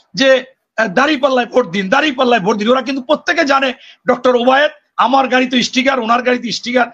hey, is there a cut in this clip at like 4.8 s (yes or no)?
no